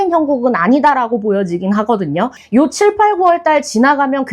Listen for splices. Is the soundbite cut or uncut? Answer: cut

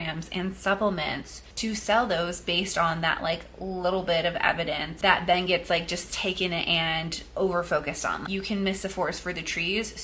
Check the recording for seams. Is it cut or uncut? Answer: cut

